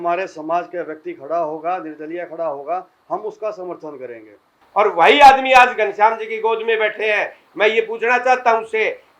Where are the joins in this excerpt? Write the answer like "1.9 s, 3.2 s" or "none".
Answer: 4.6 s